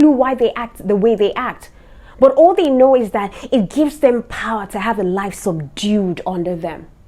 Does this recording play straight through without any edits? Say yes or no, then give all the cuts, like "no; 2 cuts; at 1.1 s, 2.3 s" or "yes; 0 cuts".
yes; 0 cuts